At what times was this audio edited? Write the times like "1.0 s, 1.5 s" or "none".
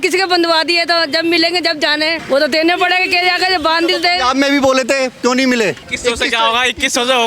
2.2 s, 5.9 s